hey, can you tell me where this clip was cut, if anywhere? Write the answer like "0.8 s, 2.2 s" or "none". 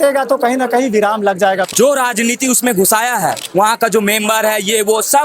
1.7 s, 3.4 s

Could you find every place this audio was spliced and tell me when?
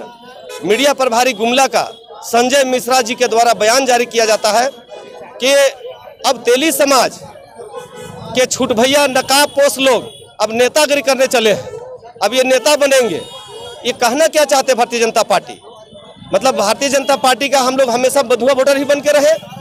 none

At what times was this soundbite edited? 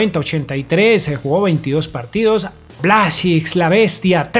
2.8 s

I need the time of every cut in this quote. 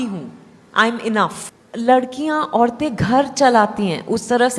1.4 s

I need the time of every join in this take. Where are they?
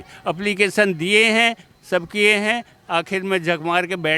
none

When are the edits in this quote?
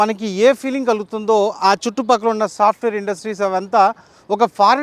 none

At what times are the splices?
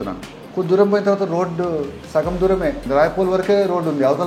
2.0 s, 2.8 s

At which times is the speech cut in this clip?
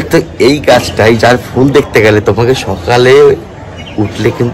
none

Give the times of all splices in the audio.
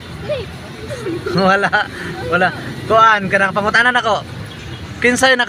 2.7 s

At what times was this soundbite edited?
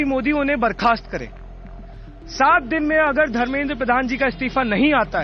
none

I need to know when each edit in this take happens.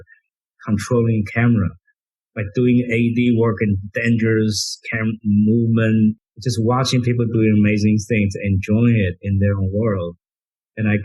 6.2 s

